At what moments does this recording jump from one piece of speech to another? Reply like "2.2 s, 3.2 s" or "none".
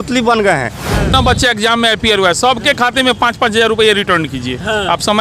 1.1 s